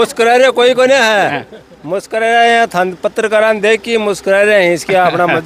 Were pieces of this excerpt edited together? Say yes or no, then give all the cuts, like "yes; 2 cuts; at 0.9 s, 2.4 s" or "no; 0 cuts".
no; 0 cuts